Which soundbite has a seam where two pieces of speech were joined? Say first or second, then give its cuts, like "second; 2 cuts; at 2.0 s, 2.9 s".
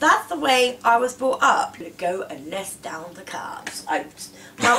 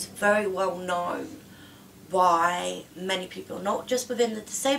first; 1 cut; at 1.8 s